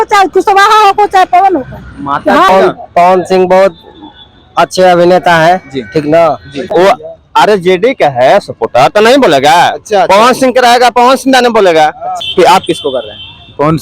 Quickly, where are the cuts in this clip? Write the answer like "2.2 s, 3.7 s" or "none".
2.5 s, 6.7 s, 12.1 s